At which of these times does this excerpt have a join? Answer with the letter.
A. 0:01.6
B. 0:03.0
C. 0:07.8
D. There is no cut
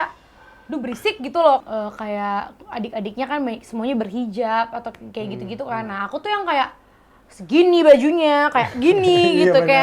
A